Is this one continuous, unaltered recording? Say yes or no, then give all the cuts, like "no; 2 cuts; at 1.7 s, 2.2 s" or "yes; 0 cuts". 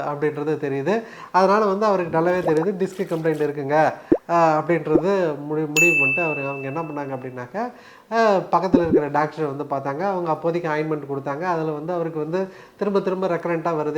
yes; 0 cuts